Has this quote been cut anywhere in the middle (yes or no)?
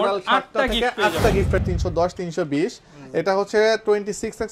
yes